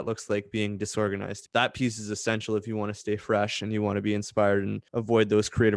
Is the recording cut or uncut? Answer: cut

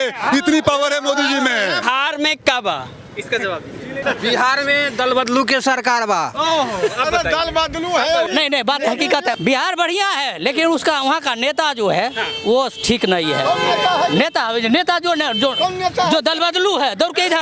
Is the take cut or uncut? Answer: cut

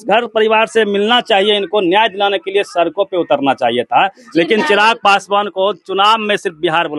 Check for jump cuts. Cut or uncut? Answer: uncut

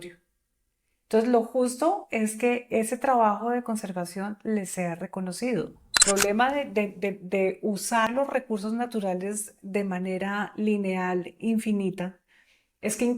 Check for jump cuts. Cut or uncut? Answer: cut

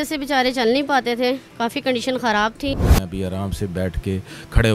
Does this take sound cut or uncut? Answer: cut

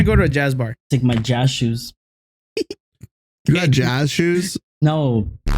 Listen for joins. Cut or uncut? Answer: cut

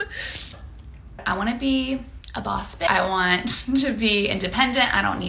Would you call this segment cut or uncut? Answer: cut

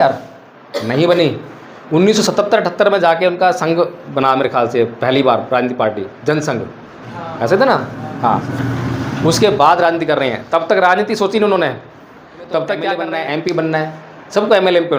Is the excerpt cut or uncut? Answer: cut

